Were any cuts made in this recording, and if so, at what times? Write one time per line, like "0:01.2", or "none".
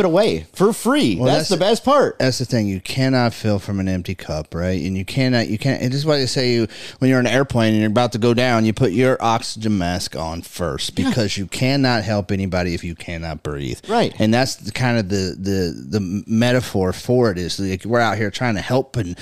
none

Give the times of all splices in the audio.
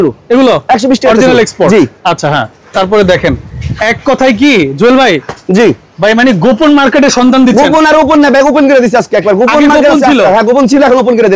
none

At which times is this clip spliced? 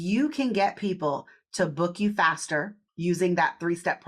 0:02.8

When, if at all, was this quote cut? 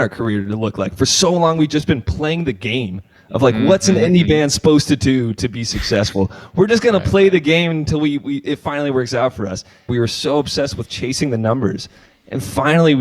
0:09.9

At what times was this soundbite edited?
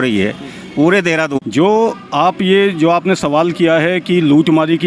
0:01.3

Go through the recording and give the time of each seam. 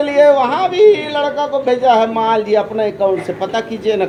none

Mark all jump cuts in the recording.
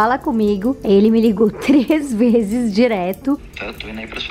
0:03.4

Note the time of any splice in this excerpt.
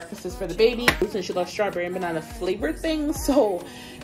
0:01.0

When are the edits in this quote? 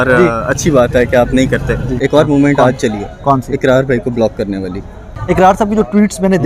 0:01.9
0:05.1

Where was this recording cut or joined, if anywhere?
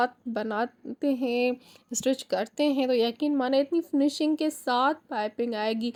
none

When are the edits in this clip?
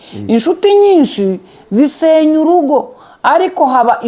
none

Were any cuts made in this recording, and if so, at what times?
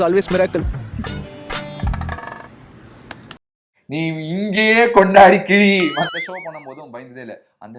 0:06.1

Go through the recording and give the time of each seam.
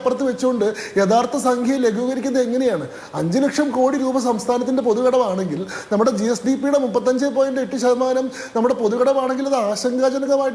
none

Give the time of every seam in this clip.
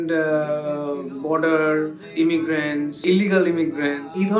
0:02.0
0:03.0

